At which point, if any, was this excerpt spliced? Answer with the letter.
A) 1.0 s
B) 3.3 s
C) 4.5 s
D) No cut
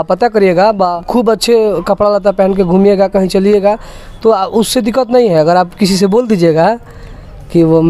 A